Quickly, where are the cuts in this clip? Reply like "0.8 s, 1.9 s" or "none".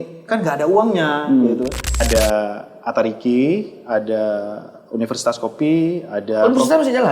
2.0 s

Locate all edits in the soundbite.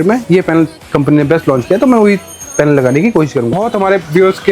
3.6 s

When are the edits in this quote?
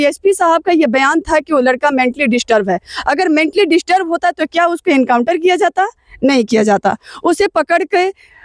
none

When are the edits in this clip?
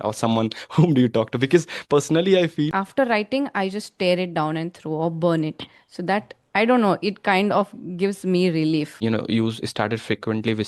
2.7 s, 8.9 s

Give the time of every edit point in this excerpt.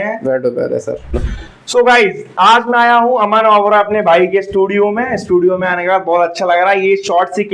1.2 s

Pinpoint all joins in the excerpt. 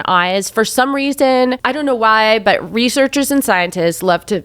1.6 s

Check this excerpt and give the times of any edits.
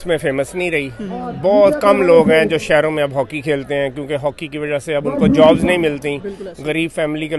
none

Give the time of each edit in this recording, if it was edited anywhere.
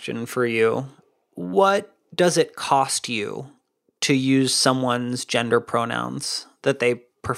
none

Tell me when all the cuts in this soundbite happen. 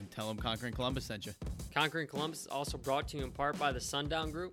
1.6 s

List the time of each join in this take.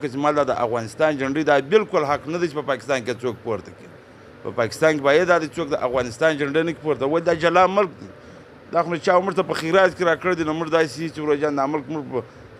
none

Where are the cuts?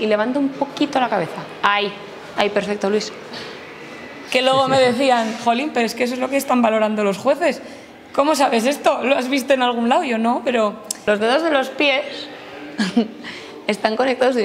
4.2 s, 10.9 s

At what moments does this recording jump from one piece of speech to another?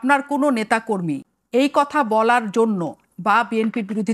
1.3 s

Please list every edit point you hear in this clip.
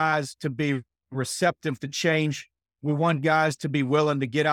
none

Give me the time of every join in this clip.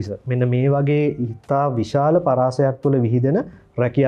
none

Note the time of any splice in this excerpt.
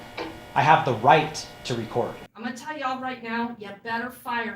2.3 s

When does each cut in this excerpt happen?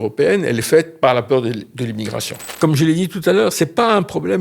2.5 s

